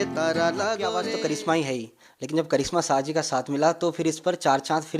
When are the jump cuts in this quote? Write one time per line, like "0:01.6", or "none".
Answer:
0:01.1